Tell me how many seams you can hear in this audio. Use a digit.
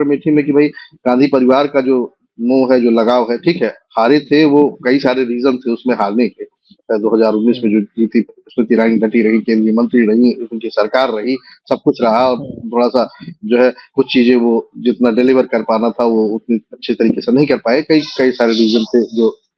0